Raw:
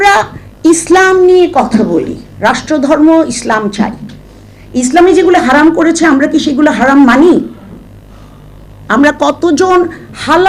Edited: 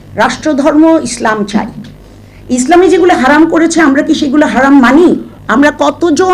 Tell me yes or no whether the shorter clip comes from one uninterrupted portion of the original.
no